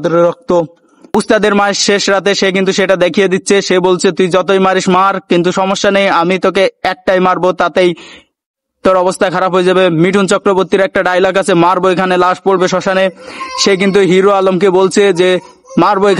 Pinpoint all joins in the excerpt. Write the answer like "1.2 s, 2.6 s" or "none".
1.1 s